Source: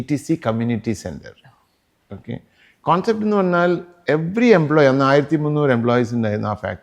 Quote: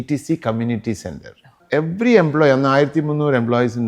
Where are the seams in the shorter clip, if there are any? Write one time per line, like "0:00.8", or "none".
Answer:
0:01.6